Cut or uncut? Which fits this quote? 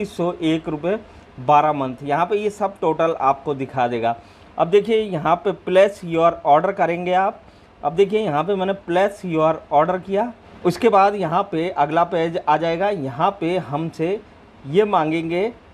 cut